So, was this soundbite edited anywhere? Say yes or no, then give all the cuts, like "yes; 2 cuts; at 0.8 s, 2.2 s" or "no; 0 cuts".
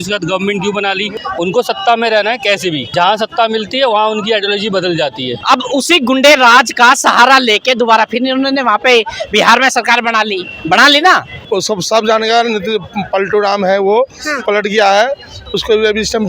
yes; 4 cuts; at 1.1 s, 2.8 s, 5.3 s, 11.4 s